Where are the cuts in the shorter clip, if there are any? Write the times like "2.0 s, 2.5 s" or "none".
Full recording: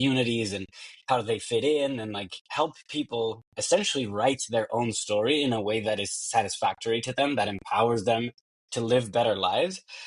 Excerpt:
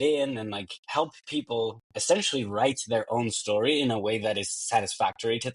none